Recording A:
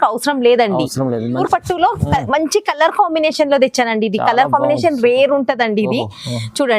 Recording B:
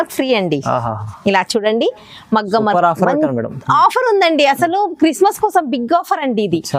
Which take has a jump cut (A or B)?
A